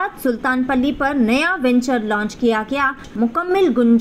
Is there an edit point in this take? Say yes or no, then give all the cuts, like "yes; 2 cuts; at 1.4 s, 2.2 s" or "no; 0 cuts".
yes; 1 cut; at 3.1 s